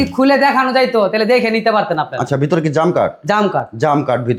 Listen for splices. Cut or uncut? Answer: uncut